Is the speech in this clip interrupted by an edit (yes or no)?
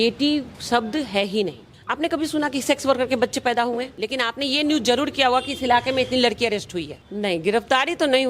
yes